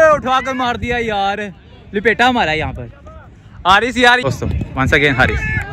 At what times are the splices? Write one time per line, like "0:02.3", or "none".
0:04.2